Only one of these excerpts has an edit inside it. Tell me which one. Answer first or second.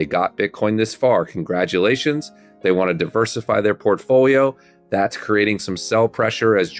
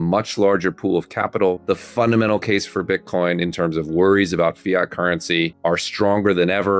second